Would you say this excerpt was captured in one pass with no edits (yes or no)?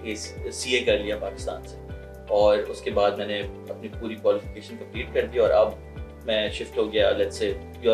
yes